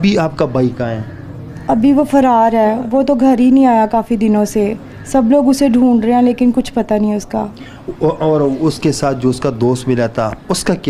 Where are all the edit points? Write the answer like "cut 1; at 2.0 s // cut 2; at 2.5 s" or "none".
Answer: none